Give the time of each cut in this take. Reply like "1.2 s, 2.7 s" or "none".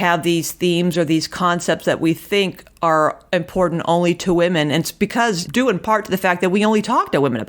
5.4 s